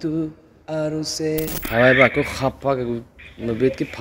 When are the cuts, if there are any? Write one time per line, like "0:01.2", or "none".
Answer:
0:01.6